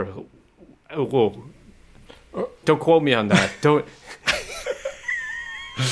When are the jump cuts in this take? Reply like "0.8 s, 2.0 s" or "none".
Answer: 2.6 s